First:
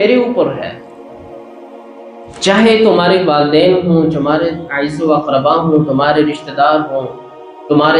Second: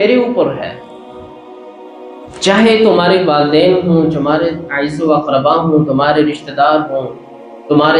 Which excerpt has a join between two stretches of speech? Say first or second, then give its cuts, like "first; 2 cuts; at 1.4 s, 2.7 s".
second; 2 cuts; at 0.7 s, 2.4 s